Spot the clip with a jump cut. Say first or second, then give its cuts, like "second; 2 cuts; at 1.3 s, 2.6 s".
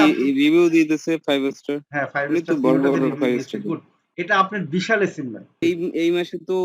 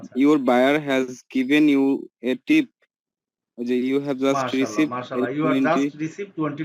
first; 1 cut; at 5.6 s